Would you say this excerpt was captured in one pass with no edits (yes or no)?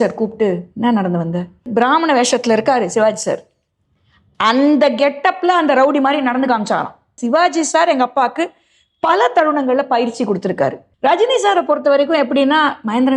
no